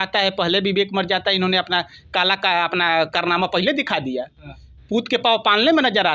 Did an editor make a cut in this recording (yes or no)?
no